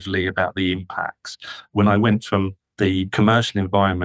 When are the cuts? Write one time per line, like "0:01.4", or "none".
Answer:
0:01.7
0:02.6